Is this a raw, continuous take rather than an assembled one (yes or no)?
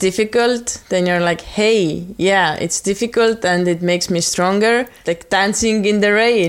no